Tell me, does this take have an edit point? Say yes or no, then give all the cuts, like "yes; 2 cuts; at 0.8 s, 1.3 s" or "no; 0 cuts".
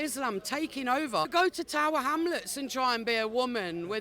yes; 1 cut; at 1.3 s